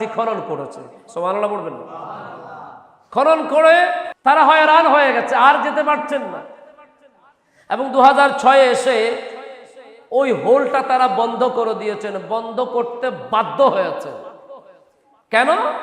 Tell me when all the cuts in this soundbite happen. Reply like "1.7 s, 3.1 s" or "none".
4.1 s